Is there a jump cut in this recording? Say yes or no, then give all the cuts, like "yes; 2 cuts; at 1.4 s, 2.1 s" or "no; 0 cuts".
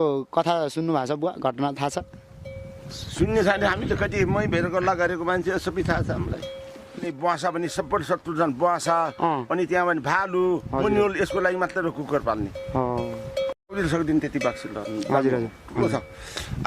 yes; 2 cuts; at 7.0 s, 13.7 s